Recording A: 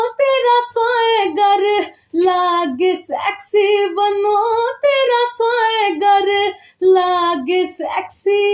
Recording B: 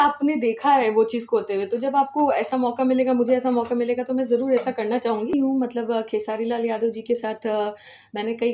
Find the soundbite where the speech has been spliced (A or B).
B